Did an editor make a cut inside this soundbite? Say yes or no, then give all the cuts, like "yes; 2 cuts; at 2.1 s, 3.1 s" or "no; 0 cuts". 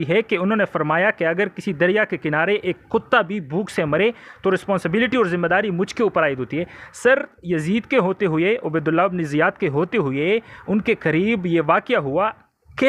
no; 0 cuts